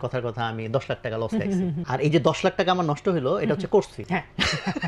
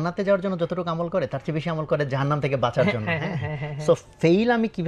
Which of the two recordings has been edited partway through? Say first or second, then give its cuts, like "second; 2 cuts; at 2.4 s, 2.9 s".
first; 2 cuts; at 1.8 s, 4.0 s